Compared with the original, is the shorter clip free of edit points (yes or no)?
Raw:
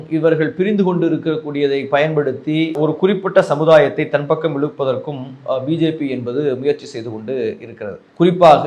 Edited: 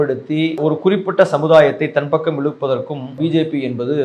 no